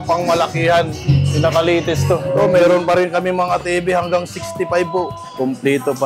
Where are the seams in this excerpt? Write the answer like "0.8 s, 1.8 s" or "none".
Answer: 1.0 s, 2.2 s